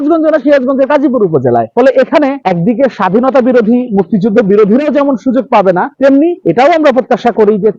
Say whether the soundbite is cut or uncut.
uncut